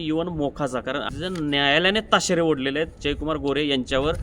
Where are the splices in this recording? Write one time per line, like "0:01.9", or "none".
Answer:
0:01.1